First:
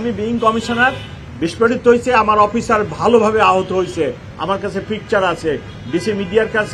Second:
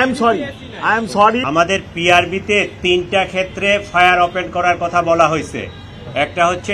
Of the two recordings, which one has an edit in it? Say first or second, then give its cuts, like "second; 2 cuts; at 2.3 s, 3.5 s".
second; 1 cut; at 1.4 s